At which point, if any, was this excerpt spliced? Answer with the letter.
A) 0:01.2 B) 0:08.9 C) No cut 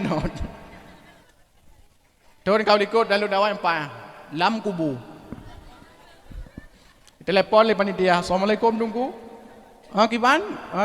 A